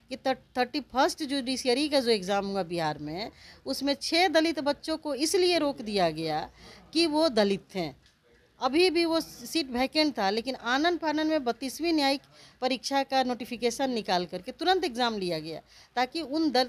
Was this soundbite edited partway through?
no; 0 cuts

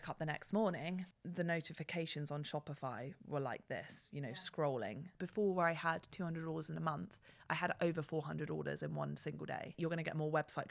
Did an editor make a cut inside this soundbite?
yes; 3 cuts; at 1.2 s, 5.2 s, 9.7 s

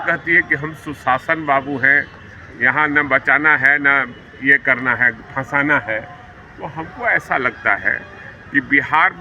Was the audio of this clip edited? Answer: no; 0 cuts

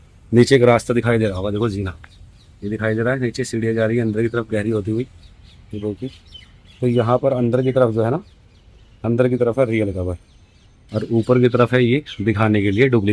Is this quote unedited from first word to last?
yes; 0 cuts

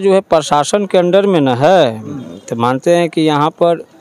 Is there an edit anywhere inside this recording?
no; 0 cuts

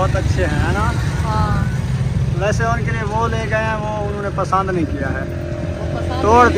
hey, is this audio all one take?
yes; 0 cuts

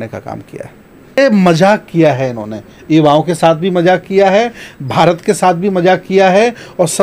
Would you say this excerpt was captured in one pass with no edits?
no; 1 cut; at 1.2 s

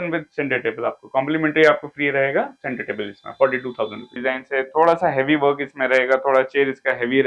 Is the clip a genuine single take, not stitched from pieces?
no; 1 cut; at 4.2 s

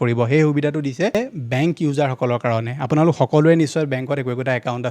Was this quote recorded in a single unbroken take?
no; 1 cut; at 1.2 s

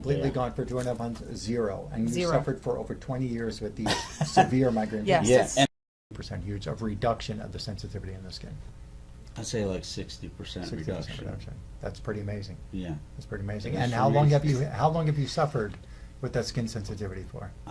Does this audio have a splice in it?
yes; 1 cut; at 5.7 s

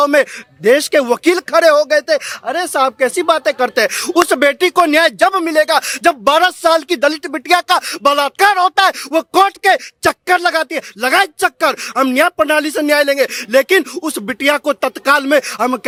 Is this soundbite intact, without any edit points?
yes; 0 cuts

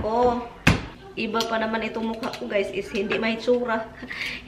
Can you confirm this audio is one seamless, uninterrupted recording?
no; 1 cut; at 1.0 s

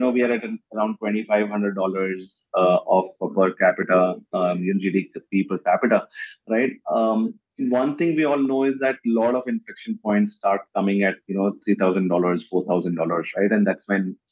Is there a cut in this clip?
no; 0 cuts

